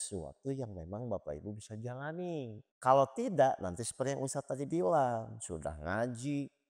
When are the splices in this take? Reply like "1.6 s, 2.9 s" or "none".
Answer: 2.6 s